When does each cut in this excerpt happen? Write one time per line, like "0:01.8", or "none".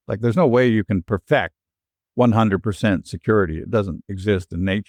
none